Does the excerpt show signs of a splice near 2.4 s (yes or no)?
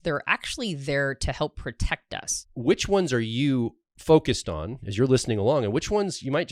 yes